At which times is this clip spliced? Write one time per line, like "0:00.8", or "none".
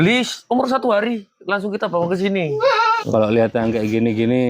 0:03.0